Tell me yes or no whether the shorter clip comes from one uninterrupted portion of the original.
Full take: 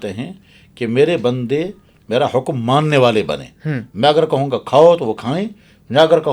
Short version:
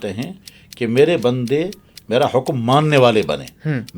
yes